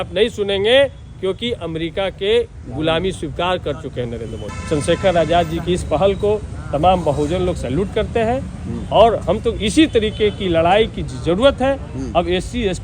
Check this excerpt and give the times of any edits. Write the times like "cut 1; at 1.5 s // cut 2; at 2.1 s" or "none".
cut 1; at 4.4 s

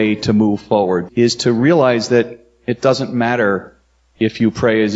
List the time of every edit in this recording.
cut 1; at 1.0 s

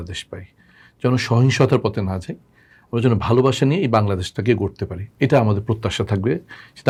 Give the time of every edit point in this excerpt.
none

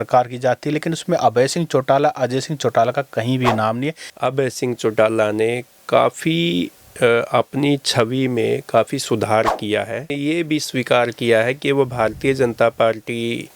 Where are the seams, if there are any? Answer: cut 1; at 4.0 s // cut 2; at 10.2 s

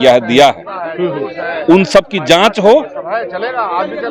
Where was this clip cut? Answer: none

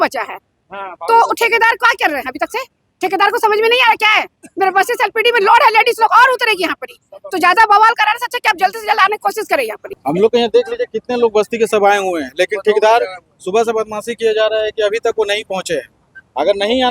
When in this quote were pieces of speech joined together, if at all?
cut 1; at 9.9 s

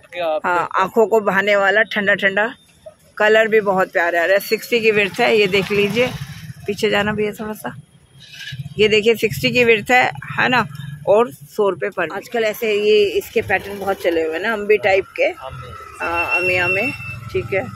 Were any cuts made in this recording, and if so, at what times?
none

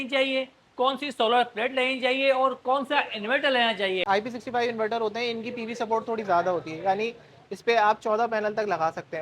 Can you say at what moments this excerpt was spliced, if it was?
cut 1; at 4.0 s

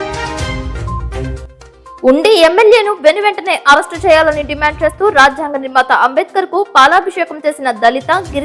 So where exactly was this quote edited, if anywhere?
none

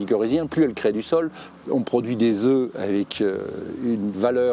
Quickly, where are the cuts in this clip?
cut 1; at 1.4 s

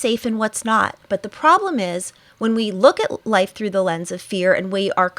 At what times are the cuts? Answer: cut 1; at 1.0 s

